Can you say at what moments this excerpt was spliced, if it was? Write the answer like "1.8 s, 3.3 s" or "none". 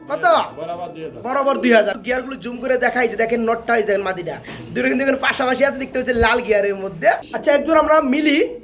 2.0 s, 7.3 s